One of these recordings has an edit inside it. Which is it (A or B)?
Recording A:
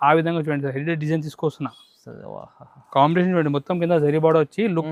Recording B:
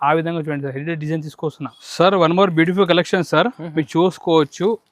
B